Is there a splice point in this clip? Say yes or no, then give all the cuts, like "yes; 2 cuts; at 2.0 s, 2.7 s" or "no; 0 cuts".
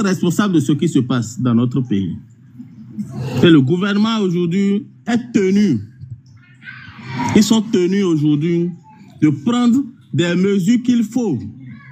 no; 0 cuts